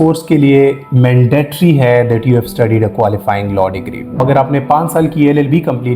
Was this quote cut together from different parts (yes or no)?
yes